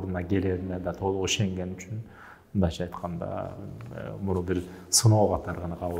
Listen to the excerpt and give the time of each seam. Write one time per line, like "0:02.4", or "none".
none